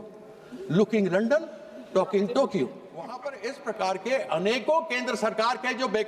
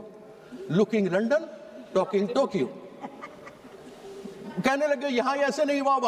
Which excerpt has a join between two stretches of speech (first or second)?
first